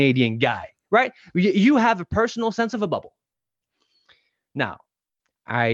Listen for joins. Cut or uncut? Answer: uncut